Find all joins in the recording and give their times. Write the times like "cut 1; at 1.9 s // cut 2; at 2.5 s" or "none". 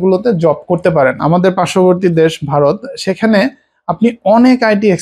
cut 1; at 1.2 s